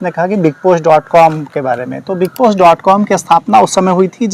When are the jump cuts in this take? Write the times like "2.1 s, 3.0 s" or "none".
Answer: none

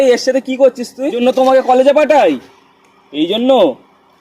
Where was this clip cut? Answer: 1.2 s

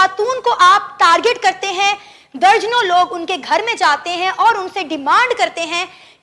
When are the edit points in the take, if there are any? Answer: none

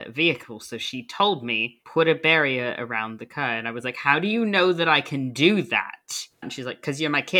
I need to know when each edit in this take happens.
6.4 s

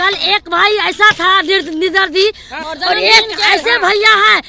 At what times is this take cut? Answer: 2.6 s

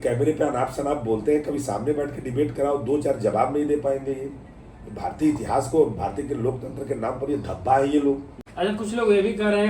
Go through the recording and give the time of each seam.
8.4 s

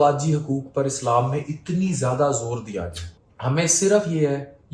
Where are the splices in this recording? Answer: 3.0 s

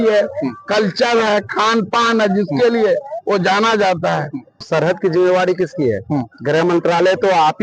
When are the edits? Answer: 4.6 s

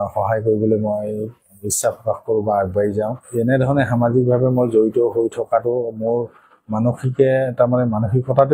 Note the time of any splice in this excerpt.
3.2 s

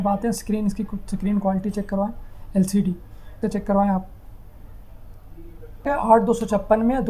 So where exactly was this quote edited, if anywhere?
3.4 s, 5.9 s

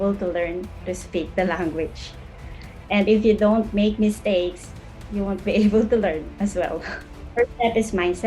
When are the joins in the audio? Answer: 7.2 s

